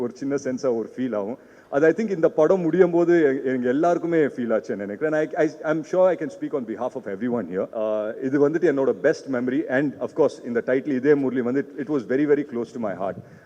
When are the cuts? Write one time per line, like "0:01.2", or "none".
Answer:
0:07.7